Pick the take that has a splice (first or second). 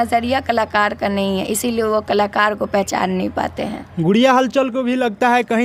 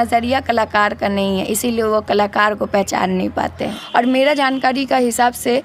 second